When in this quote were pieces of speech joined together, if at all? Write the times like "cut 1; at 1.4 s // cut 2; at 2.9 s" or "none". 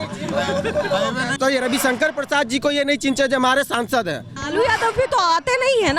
cut 1; at 1.4 s // cut 2; at 4.4 s